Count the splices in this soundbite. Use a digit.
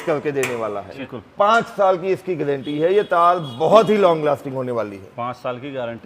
1